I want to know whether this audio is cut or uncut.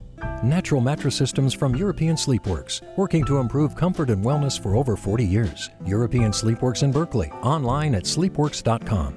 uncut